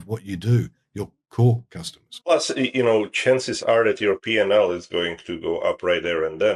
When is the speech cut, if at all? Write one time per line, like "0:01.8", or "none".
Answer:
none